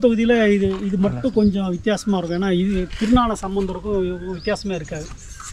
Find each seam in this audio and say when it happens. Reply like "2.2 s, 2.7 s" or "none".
none